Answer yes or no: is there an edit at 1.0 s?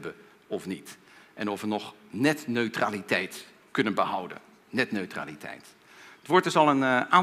no